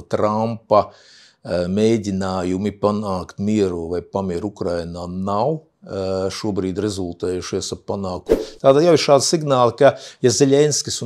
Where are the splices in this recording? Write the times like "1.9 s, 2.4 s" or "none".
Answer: 8.3 s